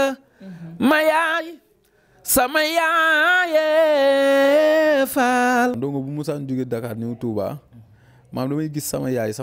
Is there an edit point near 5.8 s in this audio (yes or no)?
yes